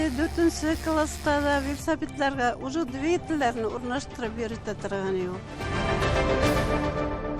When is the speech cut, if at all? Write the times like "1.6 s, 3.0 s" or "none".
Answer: 5.5 s